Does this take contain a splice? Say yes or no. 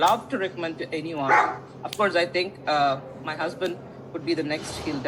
no